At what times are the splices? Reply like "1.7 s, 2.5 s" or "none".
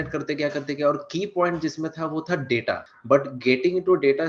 2.9 s